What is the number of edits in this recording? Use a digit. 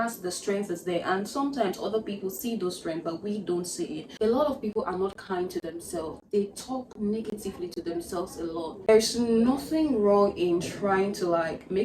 2